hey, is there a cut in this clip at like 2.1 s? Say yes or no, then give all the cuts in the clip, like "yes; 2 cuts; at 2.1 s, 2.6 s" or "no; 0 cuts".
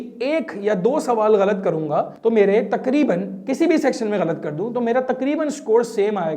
yes; 1 cut; at 2.1 s